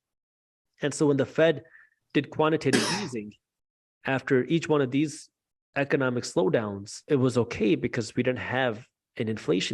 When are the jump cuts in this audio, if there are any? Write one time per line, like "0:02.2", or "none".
0:07.0